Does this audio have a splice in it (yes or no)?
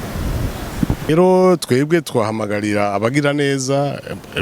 yes